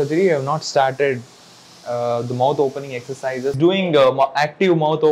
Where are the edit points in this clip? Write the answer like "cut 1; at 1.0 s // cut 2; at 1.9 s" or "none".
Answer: cut 1; at 3.6 s